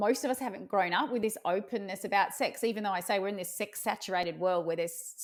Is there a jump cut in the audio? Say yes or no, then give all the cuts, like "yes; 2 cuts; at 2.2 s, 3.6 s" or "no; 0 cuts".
no; 0 cuts